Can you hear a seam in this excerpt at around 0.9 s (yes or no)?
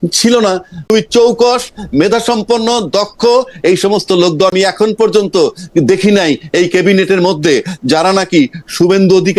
yes